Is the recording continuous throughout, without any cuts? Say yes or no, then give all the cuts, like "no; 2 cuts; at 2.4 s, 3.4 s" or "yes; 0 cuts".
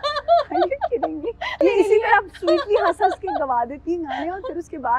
no; 1 cut; at 1.6 s